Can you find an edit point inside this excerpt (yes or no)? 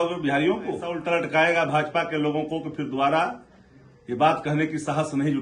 yes